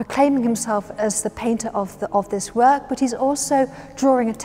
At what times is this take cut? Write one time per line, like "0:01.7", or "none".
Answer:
none